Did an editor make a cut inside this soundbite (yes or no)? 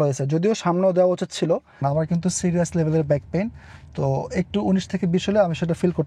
yes